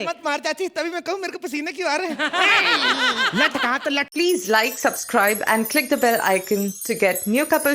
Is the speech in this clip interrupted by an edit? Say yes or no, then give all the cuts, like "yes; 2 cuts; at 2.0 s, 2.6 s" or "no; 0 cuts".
yes; 1 cut; at 4.1 s